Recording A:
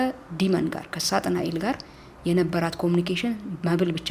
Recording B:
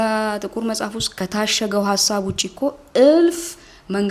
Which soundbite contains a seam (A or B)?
B